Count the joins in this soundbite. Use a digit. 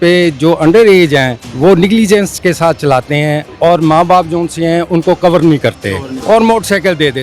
3